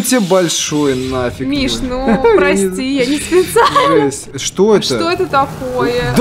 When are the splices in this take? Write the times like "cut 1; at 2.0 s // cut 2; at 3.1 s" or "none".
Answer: cut 1; at 4.3 s